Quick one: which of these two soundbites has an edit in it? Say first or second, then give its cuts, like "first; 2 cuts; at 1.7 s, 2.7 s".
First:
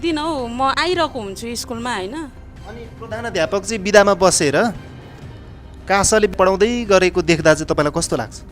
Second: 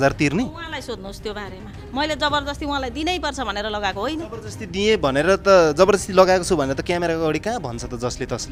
first; 1 cut; at 2.3 s